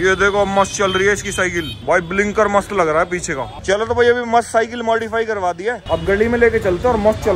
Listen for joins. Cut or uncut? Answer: uncut